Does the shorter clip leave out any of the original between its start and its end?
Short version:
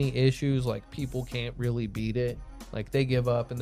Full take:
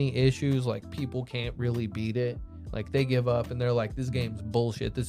no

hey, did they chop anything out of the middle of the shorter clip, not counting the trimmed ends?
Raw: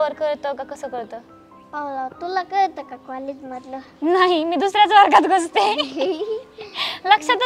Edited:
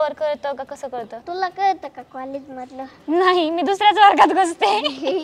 yes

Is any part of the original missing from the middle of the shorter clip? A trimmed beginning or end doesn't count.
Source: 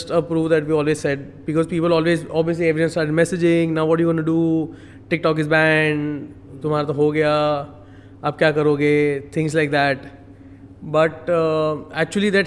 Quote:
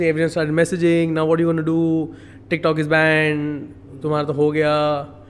no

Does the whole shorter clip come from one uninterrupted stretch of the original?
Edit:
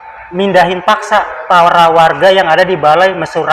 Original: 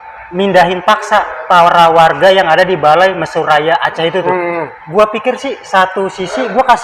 yes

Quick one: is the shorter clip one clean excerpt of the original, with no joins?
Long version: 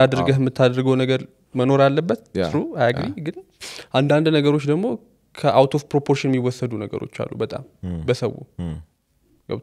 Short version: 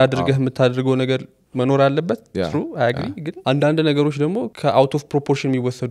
no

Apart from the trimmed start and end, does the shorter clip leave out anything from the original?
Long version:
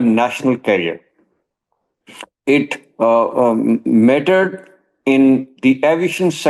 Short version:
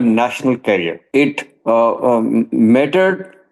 yes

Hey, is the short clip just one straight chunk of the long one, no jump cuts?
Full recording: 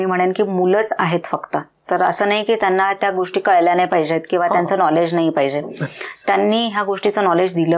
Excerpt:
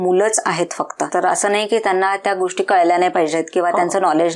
no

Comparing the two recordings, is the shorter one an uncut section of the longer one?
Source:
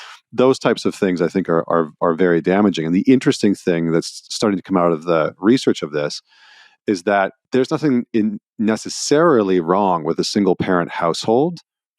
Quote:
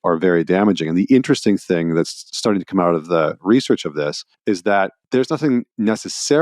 no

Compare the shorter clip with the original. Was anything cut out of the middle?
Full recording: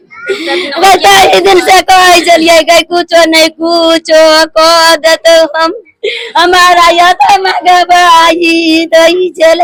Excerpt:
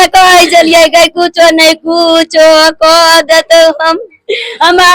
no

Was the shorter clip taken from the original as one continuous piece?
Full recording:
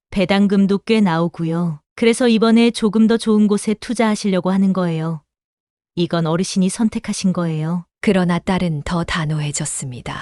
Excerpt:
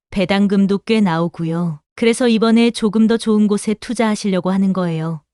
yes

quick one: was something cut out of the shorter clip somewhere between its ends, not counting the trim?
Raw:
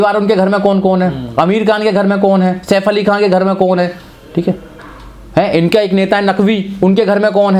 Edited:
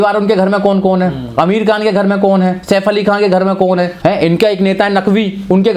yes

